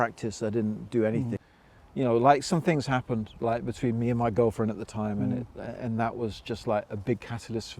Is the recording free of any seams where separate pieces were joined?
no; 1 cut; at 1.4 s

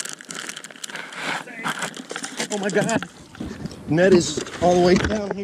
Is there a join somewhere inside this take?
no; 0 cuts

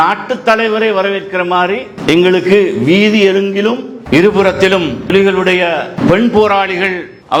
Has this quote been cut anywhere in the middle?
no; 0 cuts

